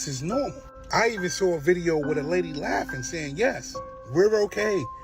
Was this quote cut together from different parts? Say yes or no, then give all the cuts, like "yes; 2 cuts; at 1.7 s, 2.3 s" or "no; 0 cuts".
no; 0 cuts